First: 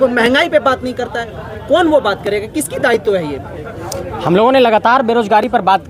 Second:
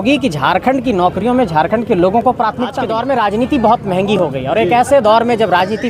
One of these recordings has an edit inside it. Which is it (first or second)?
second